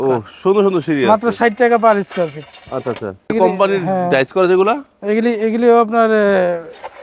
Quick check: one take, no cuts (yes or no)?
no